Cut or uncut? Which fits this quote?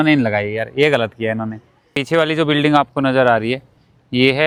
uncut